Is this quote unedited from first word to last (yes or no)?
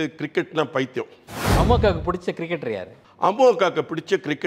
no